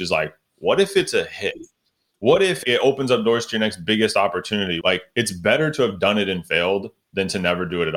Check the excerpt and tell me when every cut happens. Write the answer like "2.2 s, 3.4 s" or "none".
2.6 s, 4.8 s